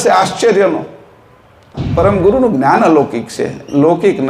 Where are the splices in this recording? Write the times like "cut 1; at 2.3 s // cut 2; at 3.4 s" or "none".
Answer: cut 1; at 1.8 s